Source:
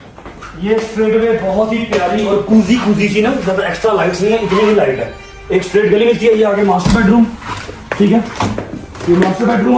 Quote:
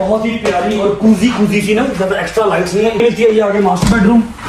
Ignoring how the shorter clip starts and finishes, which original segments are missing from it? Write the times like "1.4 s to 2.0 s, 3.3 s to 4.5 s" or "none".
4.5 s to 6.0 s